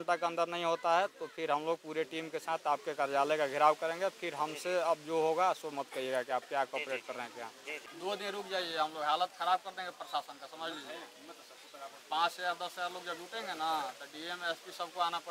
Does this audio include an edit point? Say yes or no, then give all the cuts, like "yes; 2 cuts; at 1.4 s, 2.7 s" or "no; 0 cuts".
yes; 1 cut; at 8.0 s